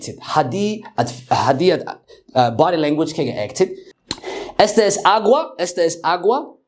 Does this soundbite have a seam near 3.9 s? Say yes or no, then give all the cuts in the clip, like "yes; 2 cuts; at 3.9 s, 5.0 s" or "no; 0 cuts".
yes; 1 cut; at 3.9 s